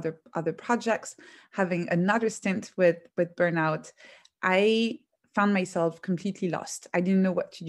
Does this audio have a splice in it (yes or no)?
yes